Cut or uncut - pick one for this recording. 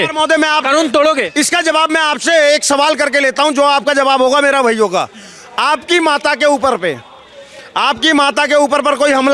uncut